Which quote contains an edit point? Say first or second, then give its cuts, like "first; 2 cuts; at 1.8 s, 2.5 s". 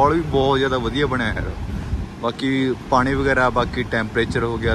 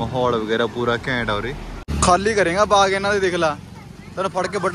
second; 1 cut; at 1.9 s